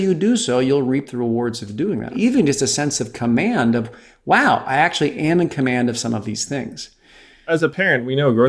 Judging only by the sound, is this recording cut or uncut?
cut